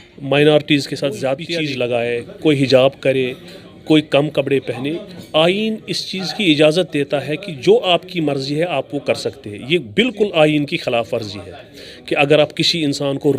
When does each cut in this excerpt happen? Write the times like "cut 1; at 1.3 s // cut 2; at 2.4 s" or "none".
cut 1; at 1.4 s